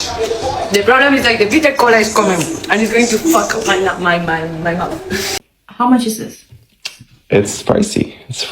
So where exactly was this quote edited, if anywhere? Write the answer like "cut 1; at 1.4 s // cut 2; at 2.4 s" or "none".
cut 1; at 5.3 s